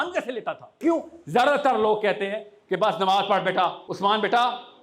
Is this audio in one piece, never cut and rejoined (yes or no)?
no